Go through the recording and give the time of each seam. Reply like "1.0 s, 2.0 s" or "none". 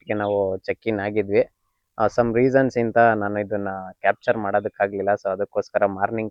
none